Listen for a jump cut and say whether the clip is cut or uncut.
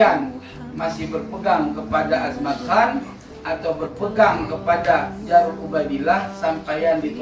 uncut